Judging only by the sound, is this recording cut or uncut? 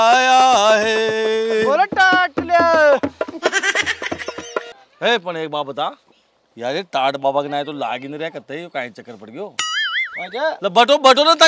cut